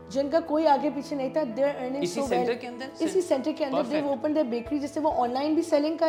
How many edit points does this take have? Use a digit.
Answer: 0